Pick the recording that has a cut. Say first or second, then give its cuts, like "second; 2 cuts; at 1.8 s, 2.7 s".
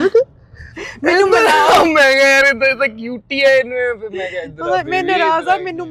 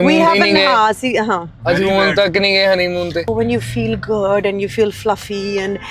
second; 1 cut; at 3.3 s